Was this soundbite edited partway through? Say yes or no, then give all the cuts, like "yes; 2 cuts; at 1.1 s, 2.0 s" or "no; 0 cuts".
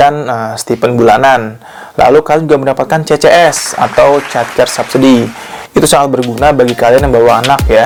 no; 0 cuts